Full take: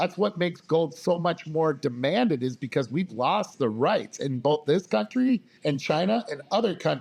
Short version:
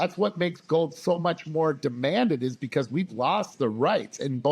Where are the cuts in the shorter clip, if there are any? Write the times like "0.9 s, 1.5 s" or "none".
none